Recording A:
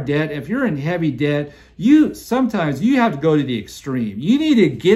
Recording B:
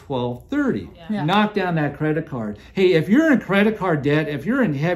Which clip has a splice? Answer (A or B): B